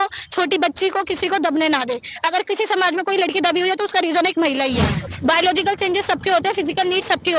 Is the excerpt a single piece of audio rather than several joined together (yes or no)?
no